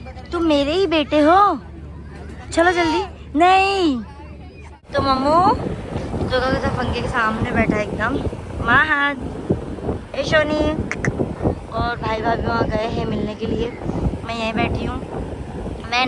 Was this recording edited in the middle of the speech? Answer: no; 0 cuts

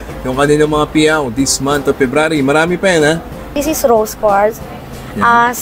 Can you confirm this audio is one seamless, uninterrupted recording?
no; 1 cut; at 3.4 s

